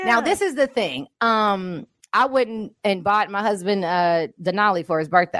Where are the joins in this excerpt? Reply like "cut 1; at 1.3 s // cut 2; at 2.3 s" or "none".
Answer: none

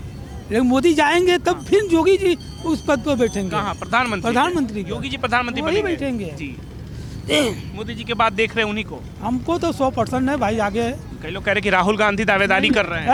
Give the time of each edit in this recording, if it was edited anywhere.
none

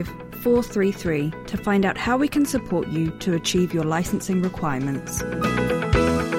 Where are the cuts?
cut 1; at 5.2 s

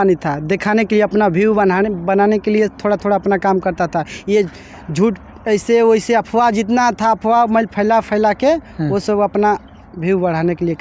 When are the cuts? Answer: none

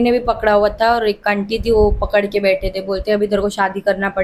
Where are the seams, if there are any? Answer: none

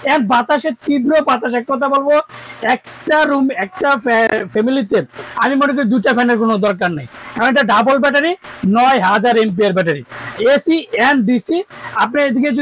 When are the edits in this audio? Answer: none

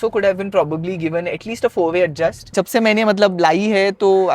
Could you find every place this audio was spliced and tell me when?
cut 1; at 2.5 s

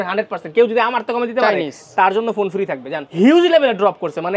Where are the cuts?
cut 1; at 3.0 s

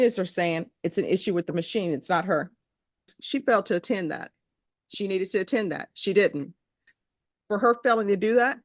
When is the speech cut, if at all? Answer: cut 1; at 3.2 s // cut 2; at 6.9 s

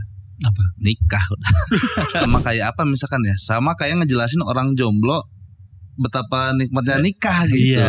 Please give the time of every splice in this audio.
cut 1; at 2.3 s

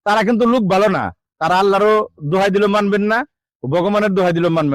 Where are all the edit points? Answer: none

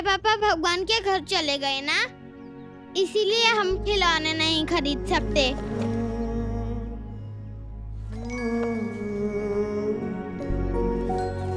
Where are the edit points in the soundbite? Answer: cut 1; at 5.6 s

